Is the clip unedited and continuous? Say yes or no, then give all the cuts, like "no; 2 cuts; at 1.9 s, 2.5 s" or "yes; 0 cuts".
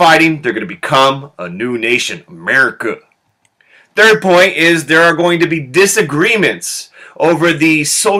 yes; 0 cuts